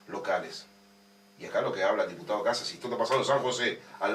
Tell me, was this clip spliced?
no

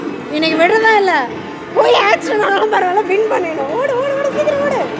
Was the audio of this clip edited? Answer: no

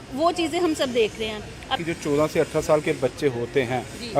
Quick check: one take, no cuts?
no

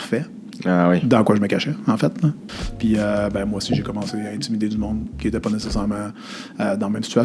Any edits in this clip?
yes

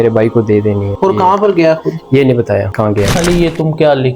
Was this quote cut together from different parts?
yes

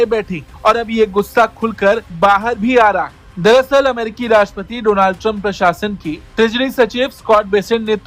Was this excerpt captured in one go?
yes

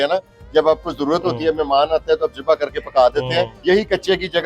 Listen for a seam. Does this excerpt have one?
yes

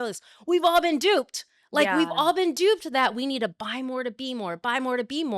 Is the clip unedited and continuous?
yes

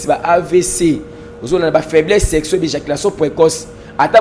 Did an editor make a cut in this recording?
no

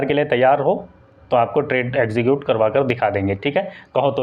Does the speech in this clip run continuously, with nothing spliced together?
yes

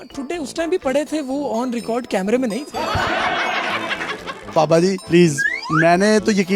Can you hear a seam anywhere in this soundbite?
yes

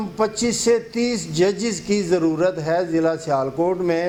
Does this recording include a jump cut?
no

